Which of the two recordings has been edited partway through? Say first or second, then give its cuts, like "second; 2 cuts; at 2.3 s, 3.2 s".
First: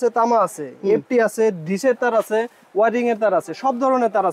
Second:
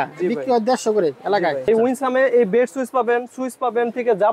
second; 1 cut; at 1.6 s